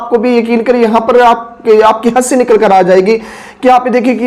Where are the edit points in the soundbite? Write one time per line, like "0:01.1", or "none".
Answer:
none